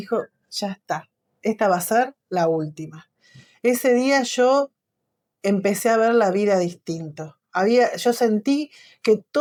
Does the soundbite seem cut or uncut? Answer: uncut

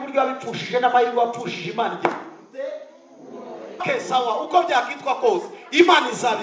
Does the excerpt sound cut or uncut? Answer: cut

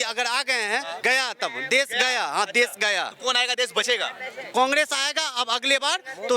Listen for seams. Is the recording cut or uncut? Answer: cut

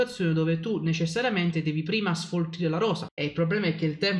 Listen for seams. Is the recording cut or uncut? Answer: cut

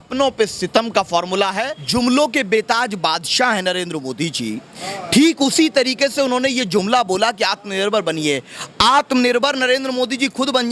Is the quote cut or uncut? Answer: cut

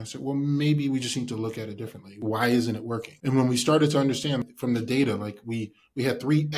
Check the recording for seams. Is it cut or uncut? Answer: cut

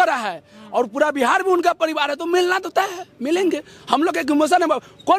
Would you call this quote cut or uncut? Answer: uncut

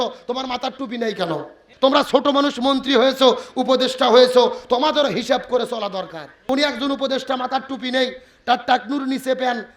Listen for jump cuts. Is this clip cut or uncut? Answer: cut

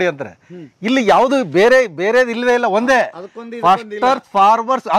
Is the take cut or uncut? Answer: uncut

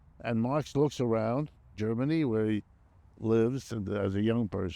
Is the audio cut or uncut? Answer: cut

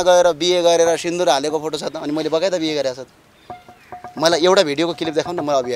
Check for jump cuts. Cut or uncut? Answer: uncut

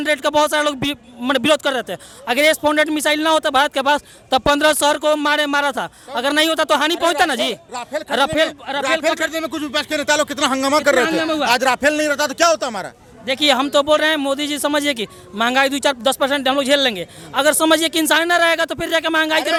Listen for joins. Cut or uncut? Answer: uncut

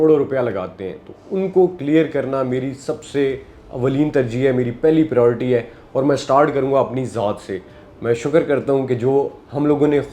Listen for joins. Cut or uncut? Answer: uncut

